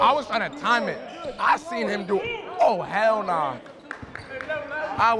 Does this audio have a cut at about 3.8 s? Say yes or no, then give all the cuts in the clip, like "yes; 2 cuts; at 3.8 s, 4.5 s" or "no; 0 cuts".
no; 0 cuts